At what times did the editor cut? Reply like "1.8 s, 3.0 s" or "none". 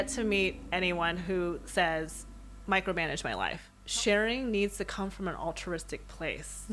3.7 s